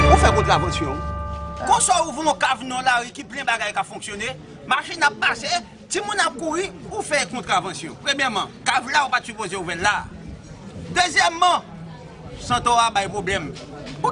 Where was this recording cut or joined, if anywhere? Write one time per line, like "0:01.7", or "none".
none